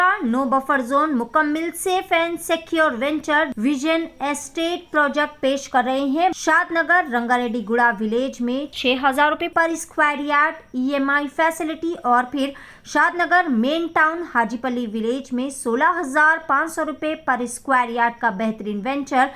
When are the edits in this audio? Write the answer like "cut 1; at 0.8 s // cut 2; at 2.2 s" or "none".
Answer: cut 1; at 3.5 s // cut 2; at 6.4 s